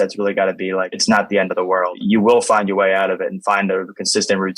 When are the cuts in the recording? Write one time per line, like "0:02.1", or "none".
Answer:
0:00.9
0:01.9